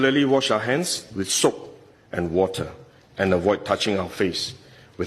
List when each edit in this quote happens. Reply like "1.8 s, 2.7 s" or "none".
none